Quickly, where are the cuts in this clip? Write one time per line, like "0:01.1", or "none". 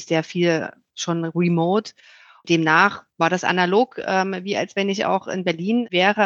none